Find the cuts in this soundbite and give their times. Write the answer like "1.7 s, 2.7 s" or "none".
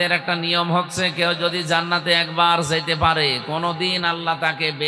none